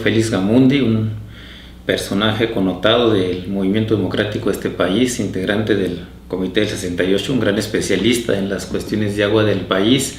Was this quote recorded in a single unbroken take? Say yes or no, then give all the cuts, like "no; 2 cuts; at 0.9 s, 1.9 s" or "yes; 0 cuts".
yes; 0 cuts